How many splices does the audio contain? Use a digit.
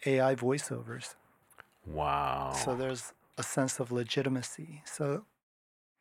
0